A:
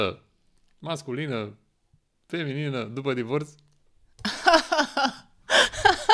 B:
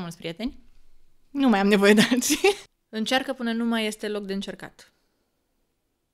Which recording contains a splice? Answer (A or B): B